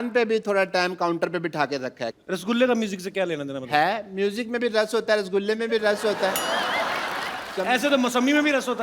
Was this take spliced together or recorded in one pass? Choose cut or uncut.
cut